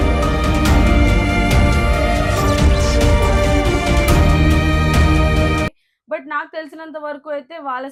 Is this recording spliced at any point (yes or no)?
no